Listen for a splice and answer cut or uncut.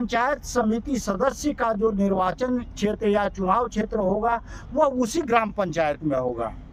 uncut